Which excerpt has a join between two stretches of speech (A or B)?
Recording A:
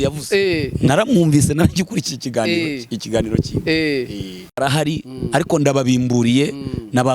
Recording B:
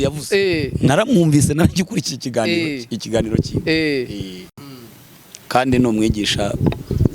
A